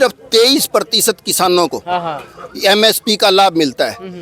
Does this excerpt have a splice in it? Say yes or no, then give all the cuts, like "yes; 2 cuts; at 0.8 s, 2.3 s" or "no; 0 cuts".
no; 0 cuts